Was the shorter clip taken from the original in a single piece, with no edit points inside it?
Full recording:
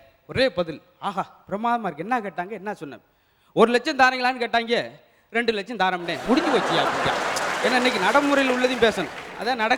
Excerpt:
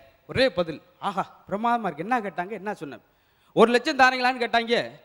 yes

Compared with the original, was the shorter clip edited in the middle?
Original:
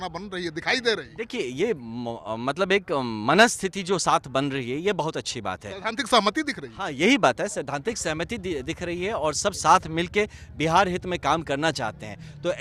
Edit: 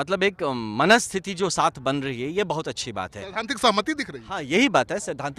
no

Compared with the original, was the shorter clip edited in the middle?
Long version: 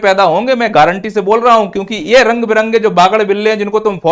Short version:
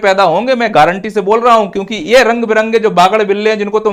no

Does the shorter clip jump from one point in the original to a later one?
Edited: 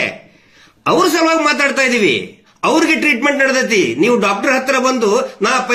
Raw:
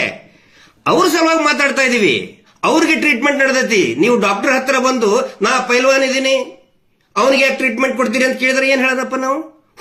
no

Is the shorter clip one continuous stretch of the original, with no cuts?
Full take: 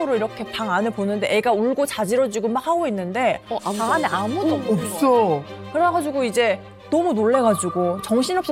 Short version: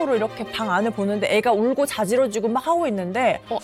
yes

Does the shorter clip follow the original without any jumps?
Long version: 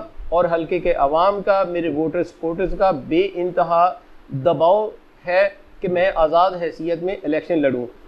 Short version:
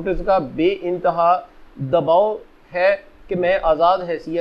yes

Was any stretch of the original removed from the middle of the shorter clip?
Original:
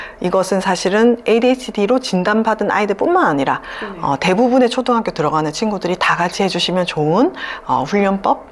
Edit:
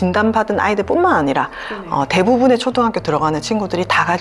no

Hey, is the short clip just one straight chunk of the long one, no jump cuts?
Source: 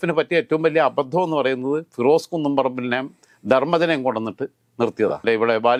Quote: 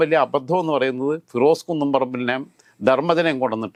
yes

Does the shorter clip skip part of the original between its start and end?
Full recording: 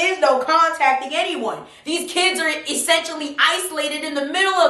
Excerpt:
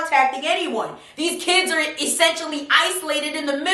no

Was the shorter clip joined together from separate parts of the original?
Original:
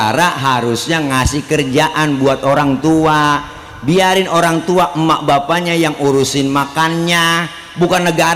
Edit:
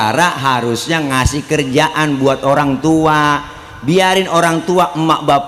no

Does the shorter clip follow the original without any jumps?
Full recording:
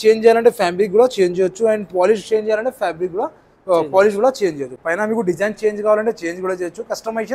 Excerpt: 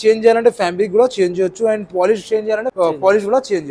no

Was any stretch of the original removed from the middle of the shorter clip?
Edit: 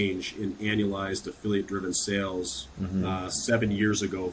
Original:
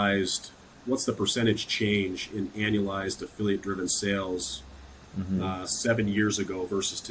yes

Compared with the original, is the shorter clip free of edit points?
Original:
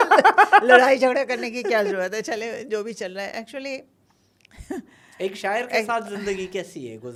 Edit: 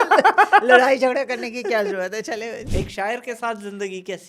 no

